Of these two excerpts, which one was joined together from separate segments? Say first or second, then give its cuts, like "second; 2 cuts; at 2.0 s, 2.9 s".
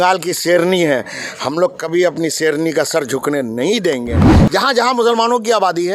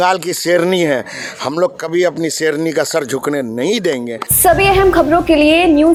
first; 1 cut; at 4.2 s